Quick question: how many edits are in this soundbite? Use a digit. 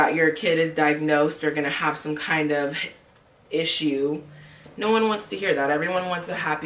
0